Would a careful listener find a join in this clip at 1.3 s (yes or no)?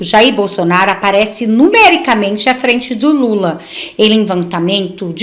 no